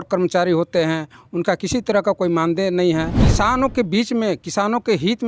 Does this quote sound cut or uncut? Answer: cut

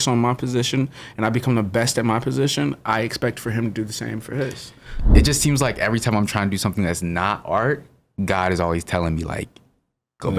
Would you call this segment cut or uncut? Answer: cut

